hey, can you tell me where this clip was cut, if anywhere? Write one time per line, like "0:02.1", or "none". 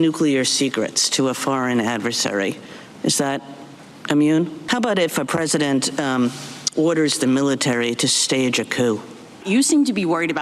0:04.6
0:09.3